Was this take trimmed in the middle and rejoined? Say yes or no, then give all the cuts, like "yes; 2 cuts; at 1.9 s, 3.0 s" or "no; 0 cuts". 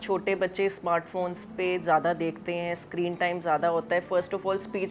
no; 0 cuts